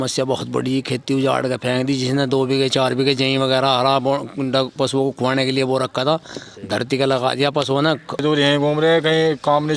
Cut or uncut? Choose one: cut